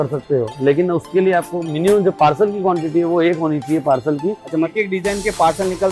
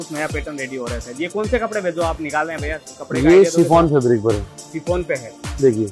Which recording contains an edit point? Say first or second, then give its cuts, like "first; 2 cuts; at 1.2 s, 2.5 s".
first; 1 cut; at 4.7 s